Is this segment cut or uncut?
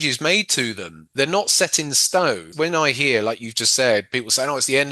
cut